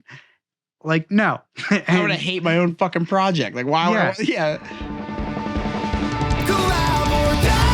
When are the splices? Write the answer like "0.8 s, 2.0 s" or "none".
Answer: 4.8 s